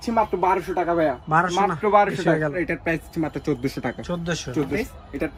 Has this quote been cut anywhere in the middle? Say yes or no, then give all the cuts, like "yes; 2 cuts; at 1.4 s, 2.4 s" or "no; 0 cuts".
no; 0 cuts